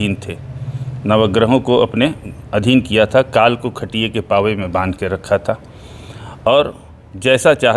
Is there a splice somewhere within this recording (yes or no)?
no